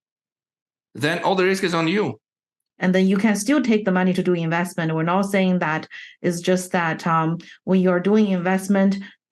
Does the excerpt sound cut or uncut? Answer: cut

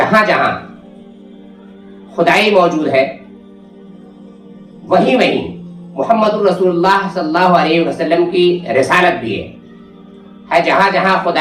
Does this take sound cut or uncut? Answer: uncut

